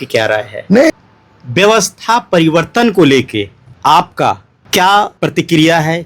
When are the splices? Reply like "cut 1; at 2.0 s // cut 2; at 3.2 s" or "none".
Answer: cut 1; at 0.9 s // cut 2; at 3.6 s // cut 3; at 4.5 s // cut 4; at 5.1 s

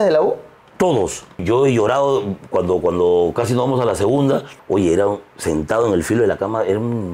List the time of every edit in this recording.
cut 1; at 1.4 s // cut 2; at 4.5 s

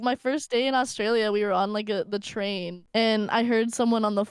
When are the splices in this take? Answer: cut 1; at 2.7 s

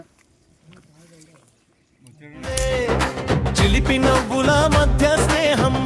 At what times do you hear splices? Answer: cut 1; at 2.5 s

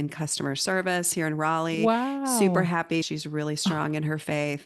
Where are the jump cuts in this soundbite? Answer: cut 1; at 3.1 s

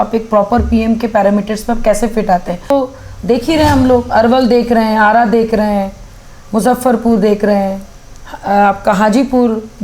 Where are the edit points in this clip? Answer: cut 1; at 2.7 s

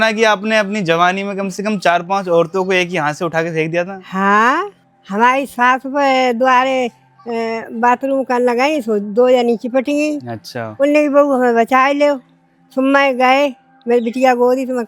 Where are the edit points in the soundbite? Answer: none

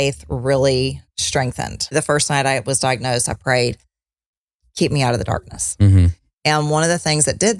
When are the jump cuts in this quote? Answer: cut 1; at 1.9 s

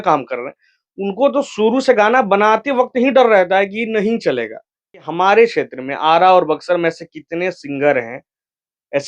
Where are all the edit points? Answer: cut 1; at 5.0 s

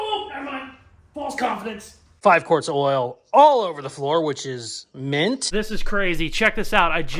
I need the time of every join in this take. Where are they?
cut 1; at 2.1 s // cut 2; at 5.5 s

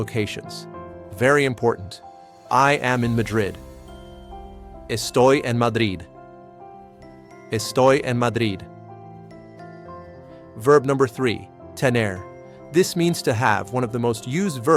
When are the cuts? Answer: cut 1; at 8.7 s // cut 2; at 10.6 s

